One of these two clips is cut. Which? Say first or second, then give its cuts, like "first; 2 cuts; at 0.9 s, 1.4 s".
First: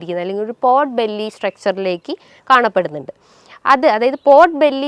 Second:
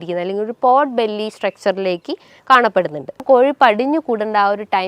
second; 1 cut; at 3.2 s